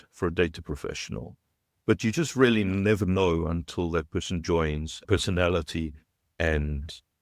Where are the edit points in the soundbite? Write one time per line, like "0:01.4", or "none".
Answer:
0:04.9

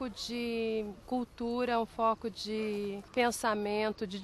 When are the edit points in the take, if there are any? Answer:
0:01.0
0:03.0

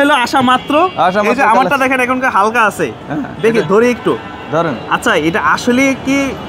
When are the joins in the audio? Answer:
none

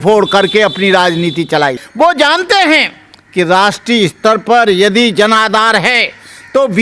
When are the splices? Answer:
0:01.8

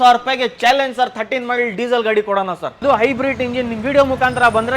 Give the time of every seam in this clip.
0:02.8

